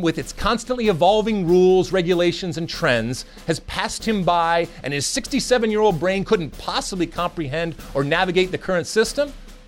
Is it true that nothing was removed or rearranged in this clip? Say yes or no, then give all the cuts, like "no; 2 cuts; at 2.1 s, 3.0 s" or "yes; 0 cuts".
yes; 0 cuts